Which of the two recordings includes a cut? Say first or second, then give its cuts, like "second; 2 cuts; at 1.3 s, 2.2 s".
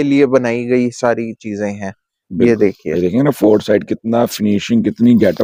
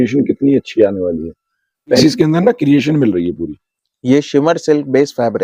second; 1 cut; at 2.0 s